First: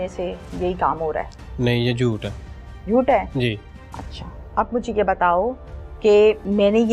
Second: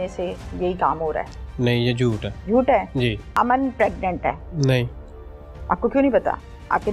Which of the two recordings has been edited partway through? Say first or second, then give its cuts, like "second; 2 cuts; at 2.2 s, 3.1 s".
second; 3 cuts; at 2.3 s, 3.3 s, 4.5 s